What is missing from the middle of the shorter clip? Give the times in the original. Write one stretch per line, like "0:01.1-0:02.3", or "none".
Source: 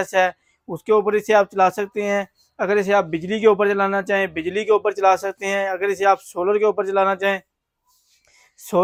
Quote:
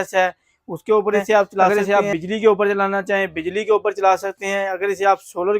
0:01.7-0:02.7

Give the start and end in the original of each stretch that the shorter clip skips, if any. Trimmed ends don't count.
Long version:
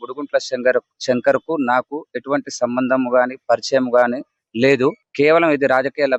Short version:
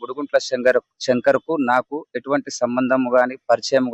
none

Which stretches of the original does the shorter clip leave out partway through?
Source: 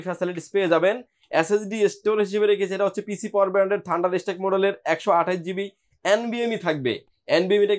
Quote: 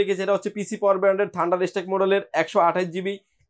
none

